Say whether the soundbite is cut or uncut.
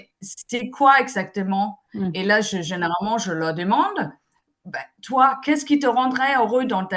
uncut